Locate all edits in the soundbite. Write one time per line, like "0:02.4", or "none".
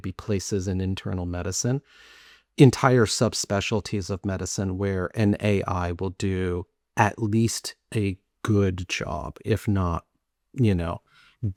none